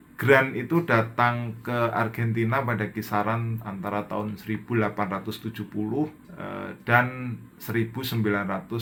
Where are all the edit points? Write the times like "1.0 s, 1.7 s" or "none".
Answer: none